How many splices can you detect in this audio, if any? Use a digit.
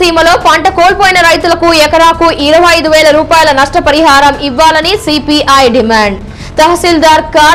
0